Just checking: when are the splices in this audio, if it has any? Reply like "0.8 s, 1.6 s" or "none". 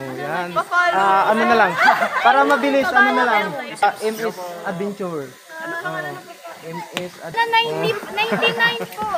3.8 s, 7.3 s